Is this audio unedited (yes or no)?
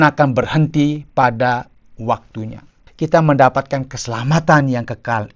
no